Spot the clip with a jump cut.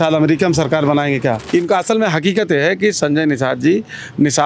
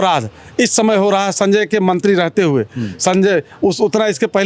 first; 1 cut; at 1.4 s

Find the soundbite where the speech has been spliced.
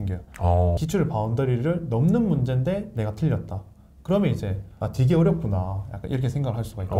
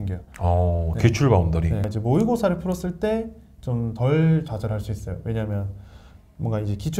first; 2 cuts; at 0.8 s, 4.7 s

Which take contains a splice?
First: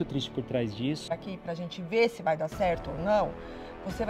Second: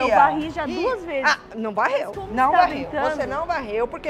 first; 1 cut; at 1.1 s

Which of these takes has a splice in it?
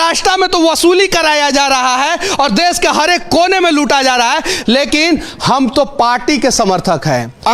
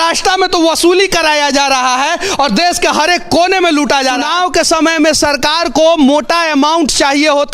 second; 1 cut; at 4.2 s

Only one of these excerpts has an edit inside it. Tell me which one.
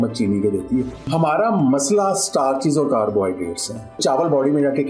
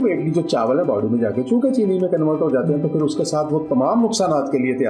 first; 2 cuts; at 1.1 s, 4.0 s

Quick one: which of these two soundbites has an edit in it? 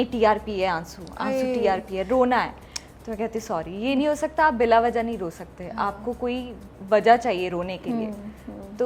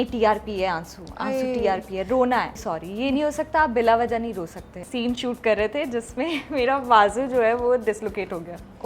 second; 2 cuts; at 2.6 s, 4.7 s

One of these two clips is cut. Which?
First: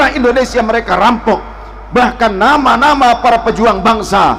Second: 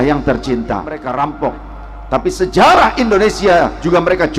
second; 1 cut; at 1.0 s

